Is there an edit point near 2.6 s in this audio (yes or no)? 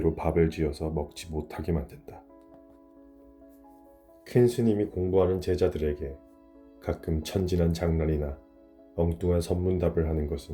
yes